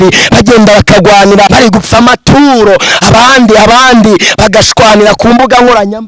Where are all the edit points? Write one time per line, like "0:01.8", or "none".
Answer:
0:01.5